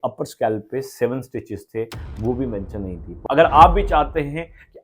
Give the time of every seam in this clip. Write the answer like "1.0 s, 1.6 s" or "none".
3.1 s